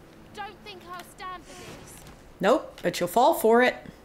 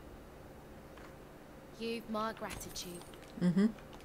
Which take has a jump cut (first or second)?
second